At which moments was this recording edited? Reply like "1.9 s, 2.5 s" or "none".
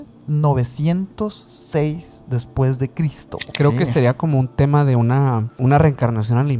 3.5 s, 5.6 s